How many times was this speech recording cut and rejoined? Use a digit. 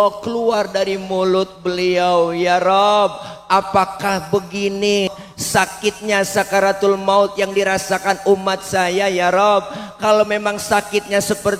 1